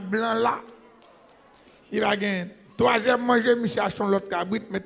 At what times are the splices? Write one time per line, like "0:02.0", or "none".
0:02.6